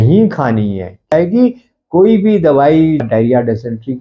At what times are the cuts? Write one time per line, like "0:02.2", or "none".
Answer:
0:01.1
0:03.0